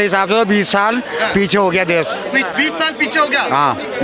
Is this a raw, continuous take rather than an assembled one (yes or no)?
yes